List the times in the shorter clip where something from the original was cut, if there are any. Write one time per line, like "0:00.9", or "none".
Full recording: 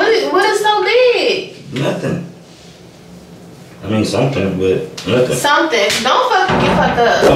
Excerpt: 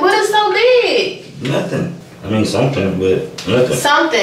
0:02.1